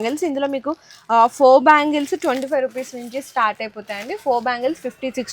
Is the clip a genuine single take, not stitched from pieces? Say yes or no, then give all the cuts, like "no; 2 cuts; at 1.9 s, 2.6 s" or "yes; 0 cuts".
yes; 0 cuts